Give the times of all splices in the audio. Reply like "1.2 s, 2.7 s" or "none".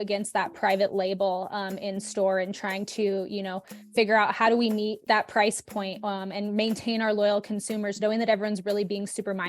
5.0 s

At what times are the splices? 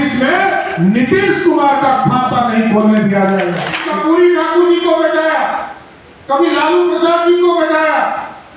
3.9 s

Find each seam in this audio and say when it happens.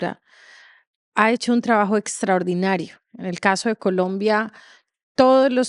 none

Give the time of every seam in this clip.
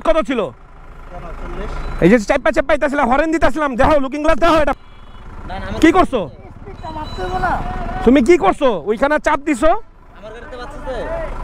none

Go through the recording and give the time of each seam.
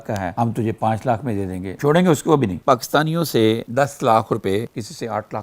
2.6 s, 3.7 s, 4.7 s

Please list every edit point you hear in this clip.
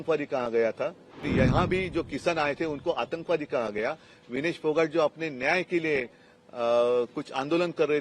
1.3 s

